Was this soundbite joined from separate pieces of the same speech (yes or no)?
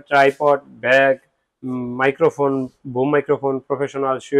no